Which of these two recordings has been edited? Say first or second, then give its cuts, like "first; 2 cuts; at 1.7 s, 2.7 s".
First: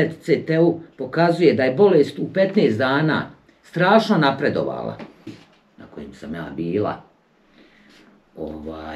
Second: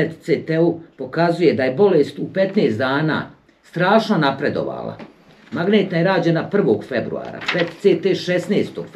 first; 1 cut; at 5.3 s